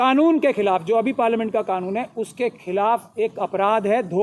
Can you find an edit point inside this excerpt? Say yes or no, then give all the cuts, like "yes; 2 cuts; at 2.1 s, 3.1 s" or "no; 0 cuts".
no; 0 cuts